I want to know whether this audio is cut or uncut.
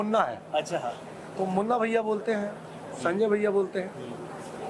uncut